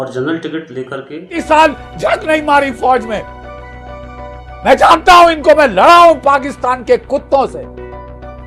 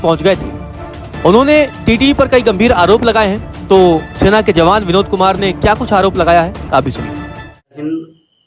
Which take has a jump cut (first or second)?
first